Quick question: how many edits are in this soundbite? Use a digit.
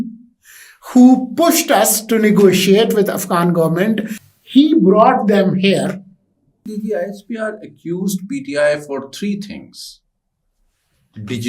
2